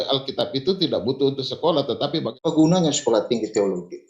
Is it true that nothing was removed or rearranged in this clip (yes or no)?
no